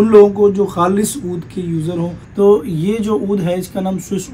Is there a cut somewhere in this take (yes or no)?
yes